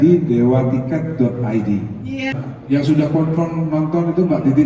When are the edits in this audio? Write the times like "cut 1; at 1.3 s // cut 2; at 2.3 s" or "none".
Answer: cut 1; at 2.4 s